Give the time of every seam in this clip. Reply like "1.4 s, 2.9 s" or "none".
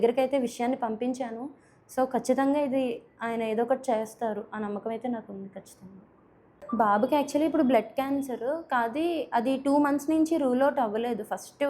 6.3 s